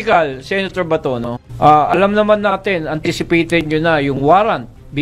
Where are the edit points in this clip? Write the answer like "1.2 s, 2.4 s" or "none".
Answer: 1.4 s